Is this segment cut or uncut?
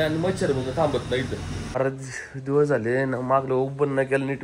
cut